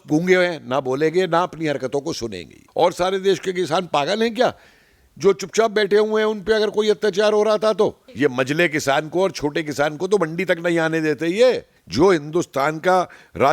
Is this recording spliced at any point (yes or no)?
yes